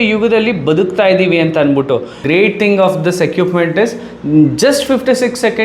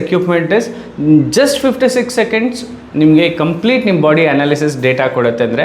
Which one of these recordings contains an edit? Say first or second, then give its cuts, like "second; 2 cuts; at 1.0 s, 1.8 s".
first; 1 cut; at 2.2 s